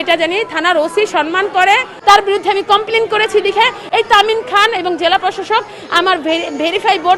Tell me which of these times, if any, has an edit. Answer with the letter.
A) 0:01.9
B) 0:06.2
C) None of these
A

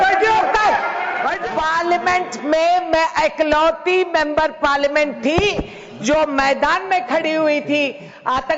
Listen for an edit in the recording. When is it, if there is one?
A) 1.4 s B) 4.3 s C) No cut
A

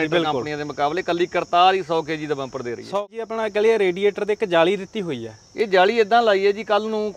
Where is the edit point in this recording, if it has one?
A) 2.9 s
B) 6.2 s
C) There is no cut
A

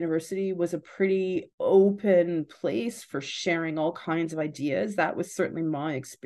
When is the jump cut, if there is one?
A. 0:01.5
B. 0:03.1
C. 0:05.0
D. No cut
A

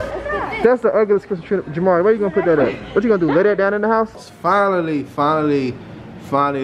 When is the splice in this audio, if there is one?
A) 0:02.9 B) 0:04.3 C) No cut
B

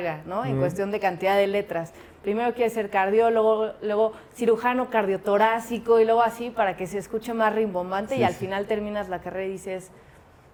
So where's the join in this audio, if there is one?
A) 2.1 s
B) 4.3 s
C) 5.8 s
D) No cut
D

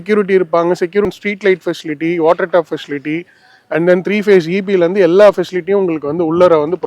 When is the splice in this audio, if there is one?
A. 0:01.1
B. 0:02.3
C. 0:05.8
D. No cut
A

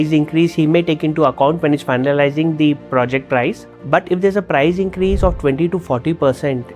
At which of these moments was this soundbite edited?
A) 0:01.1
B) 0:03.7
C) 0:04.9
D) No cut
B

